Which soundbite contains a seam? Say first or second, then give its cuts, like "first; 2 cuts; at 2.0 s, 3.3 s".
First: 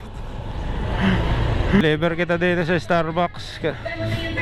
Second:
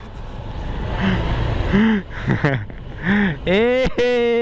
first; 1 cut; at 1.8 s